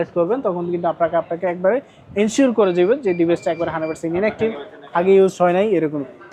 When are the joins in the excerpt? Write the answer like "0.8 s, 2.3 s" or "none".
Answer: none